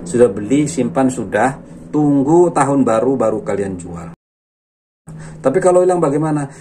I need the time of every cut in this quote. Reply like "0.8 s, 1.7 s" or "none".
4.7 s